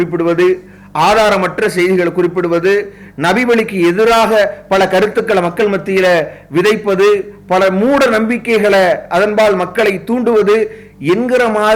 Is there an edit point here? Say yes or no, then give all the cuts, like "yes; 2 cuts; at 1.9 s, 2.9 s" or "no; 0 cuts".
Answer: no; 0 cuts